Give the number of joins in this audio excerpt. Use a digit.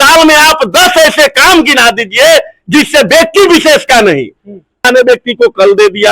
1